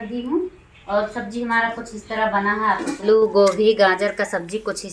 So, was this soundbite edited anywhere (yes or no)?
yes